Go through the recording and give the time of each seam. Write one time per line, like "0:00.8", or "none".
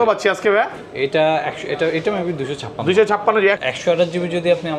0:03.6